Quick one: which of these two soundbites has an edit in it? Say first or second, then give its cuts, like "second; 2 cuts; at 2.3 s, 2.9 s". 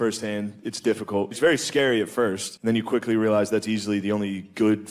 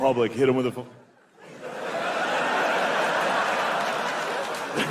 first; 2 cuts; at 1.4 s, 2.5 s